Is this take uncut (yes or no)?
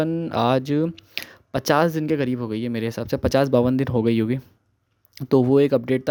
yes